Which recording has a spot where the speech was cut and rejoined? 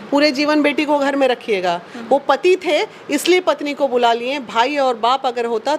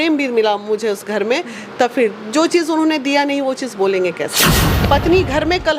second; 1 cut; at 4.7 s

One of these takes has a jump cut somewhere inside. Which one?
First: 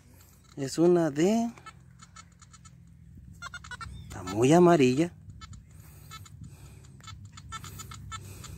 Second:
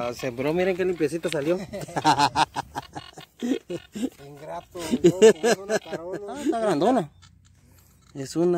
second; 1 cut; at 6.6 s

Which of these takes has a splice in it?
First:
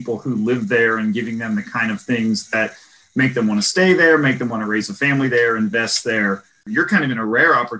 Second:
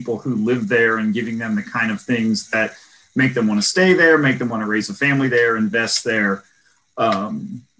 first; 1 cut; at 6.6 s

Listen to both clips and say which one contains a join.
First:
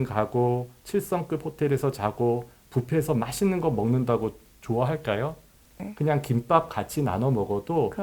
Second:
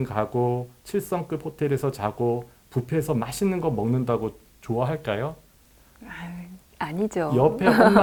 first; 1 cut; at 5.8 s

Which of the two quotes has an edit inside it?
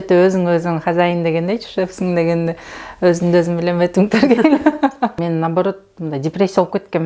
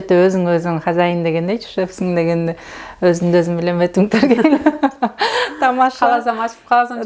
first; 1 cut; at 5.1 s

